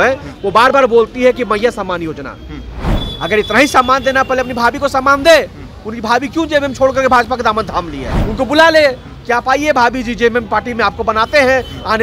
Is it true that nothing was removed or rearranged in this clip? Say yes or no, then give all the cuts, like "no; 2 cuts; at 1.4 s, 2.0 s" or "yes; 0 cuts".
no; 2 cuts; at 2.9 s, 8.2 s